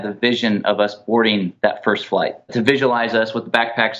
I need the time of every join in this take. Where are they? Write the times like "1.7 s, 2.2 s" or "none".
2.5 s